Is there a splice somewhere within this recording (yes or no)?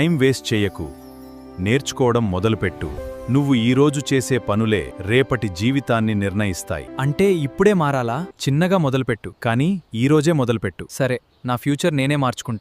yes